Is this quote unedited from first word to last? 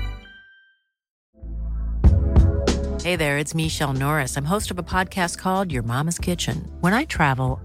no; 1 cut; at 1.2 s

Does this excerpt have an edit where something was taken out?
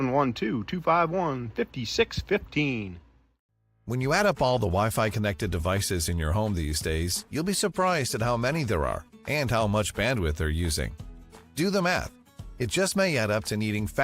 yes; 1 cut; at 3.5 s

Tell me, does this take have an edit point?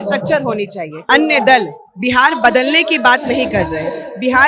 yes; 1 cut; at 1.0 s

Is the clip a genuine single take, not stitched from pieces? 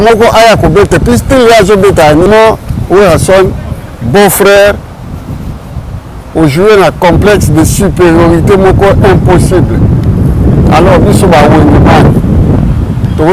no; 1 cut; at 2.3 s

